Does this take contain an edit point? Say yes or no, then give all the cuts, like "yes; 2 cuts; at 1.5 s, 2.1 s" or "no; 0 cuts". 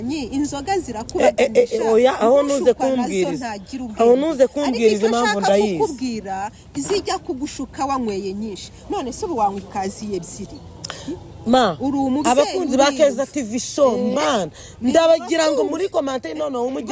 no; 0 cuts